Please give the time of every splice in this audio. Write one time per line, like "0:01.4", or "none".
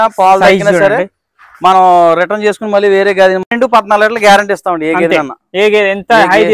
0:03.4